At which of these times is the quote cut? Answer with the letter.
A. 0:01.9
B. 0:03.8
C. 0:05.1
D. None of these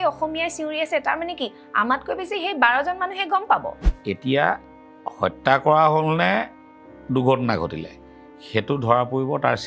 B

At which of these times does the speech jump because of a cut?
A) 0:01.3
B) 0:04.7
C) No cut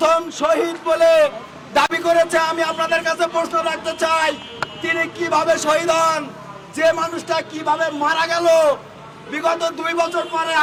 C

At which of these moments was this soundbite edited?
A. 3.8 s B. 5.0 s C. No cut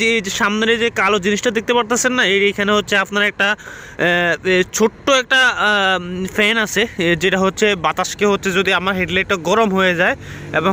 C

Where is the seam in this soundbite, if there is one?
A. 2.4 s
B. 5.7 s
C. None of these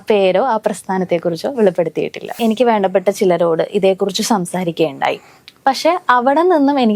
A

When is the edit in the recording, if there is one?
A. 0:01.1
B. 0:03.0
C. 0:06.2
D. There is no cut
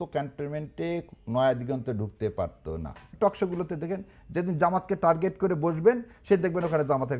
B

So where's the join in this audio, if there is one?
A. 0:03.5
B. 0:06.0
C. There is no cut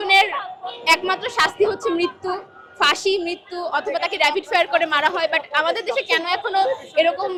C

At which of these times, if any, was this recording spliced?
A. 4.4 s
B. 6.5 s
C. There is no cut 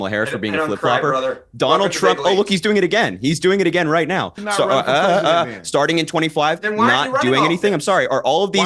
A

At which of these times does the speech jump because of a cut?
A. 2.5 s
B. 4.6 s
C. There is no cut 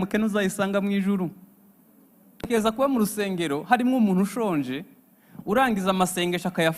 A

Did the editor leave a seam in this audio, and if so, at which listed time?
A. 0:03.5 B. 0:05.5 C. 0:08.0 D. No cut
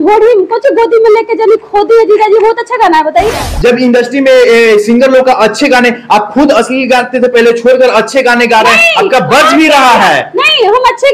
A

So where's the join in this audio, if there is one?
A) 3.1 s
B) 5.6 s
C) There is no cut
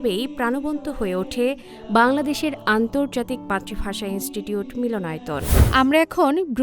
B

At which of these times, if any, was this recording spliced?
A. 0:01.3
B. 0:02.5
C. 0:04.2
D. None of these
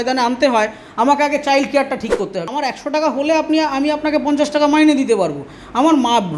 B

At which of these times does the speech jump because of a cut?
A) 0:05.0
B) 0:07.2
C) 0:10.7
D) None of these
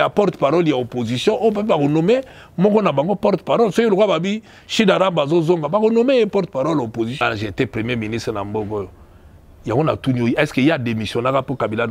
B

